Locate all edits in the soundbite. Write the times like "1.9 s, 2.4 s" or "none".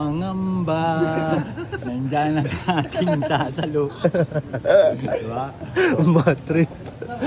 none

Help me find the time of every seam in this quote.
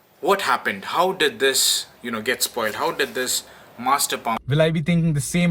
4.4 s

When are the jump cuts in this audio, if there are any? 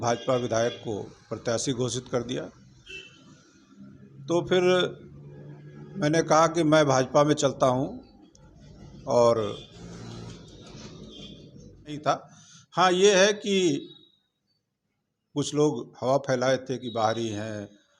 12.0 s

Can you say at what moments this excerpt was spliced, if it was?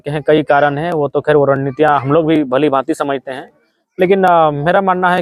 none

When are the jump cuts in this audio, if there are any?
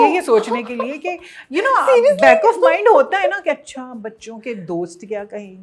none

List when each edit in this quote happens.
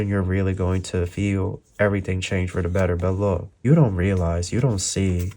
3.6 s

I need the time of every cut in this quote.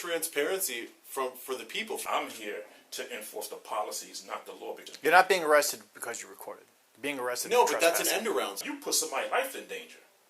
2.0 s, 4.9 s, 8.6 s

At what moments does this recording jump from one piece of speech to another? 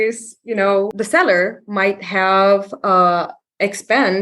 0.9 s

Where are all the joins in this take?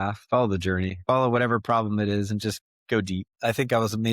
1.0 s, 3.3 s

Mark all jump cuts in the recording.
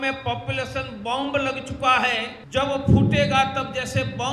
2.3 s

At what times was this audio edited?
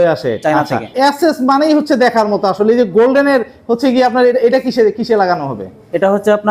1.3 s

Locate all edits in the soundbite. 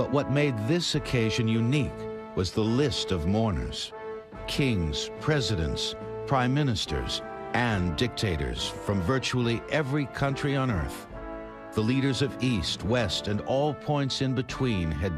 8.7 s

